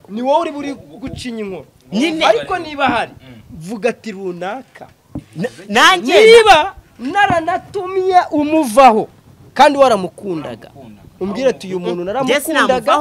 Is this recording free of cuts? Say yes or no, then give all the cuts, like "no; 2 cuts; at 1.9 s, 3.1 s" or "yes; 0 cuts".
yes; 0 cuts